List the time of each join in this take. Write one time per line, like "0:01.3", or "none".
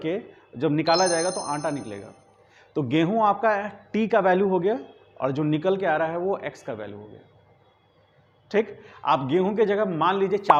none